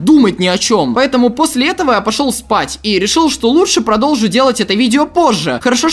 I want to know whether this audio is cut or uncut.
uncut